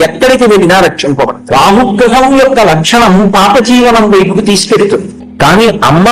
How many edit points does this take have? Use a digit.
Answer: 2